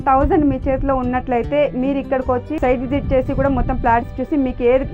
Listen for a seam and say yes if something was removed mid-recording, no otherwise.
yes